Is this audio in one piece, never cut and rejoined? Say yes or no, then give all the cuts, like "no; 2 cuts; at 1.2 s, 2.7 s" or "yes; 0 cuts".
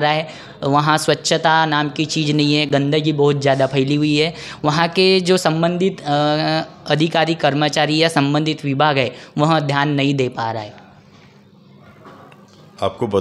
yes; 0 cuts